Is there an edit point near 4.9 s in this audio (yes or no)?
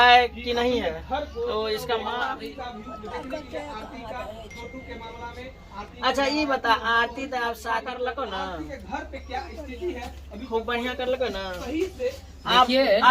no